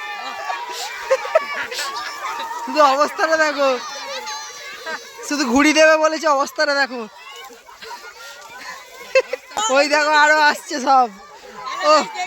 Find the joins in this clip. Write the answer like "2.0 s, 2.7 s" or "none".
9.6 s